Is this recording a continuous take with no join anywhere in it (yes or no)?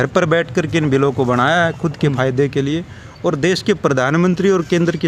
yes